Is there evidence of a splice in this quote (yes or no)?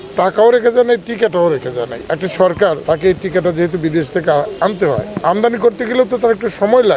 yes